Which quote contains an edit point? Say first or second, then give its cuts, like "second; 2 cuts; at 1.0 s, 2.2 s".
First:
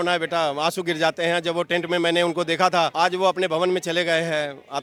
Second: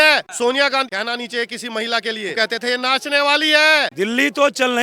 second; 3 cuts; at 0.9 s, 2.3 s, 3.9 s